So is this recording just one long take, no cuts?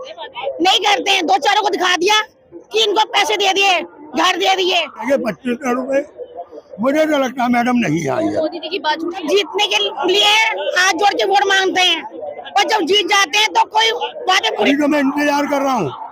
no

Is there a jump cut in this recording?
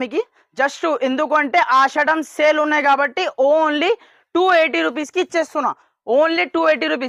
no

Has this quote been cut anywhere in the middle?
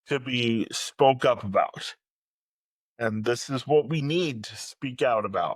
no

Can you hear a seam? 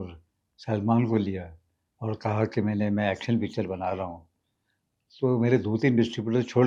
no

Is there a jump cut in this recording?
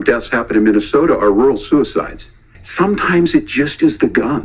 yes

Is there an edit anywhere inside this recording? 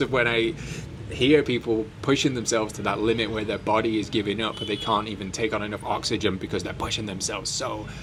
no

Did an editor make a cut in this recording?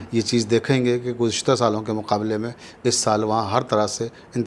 no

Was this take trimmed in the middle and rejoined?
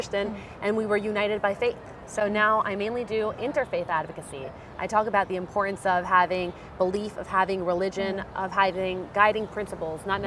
no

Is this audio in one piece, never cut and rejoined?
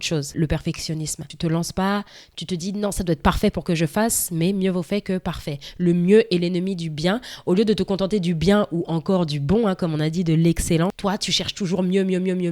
no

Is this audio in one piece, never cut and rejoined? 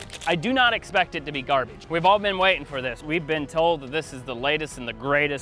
no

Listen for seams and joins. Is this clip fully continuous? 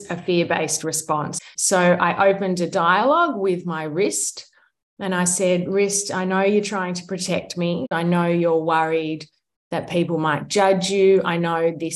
no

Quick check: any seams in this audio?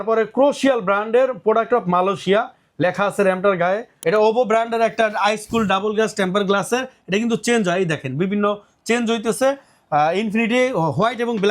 yes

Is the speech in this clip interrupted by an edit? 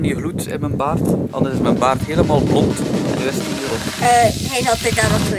no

